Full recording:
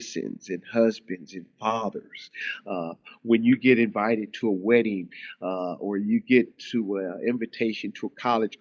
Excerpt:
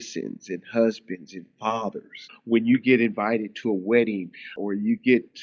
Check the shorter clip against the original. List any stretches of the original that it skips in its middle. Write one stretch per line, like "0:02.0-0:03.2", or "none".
0:02.3-0:03.1
0:05.3-0:05.7